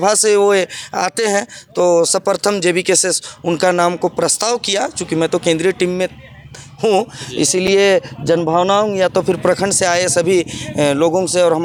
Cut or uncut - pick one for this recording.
uncut